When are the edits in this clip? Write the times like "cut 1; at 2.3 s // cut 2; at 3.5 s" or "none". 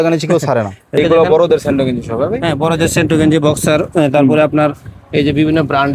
cut 1; at 1.0 s